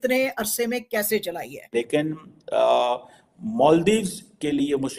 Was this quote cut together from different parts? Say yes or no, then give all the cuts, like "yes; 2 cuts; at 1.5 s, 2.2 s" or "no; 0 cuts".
yes; 1 cut; at 1.6 s